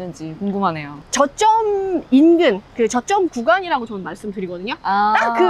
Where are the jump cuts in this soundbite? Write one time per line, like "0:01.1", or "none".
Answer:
0:00.9